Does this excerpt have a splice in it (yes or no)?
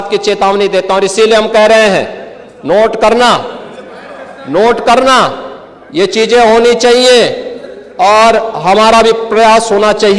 no